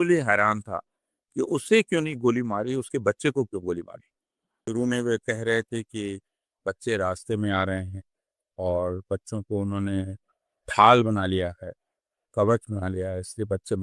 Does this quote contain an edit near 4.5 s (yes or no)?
yes